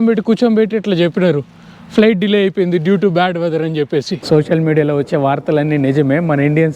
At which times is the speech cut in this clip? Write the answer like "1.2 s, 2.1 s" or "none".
4.2 s